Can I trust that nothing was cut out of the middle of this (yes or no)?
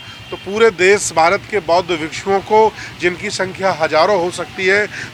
yes